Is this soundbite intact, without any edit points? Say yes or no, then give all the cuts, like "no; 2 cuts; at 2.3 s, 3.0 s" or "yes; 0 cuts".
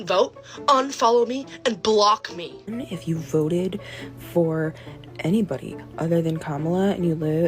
no; 1 cut; at 2.7 s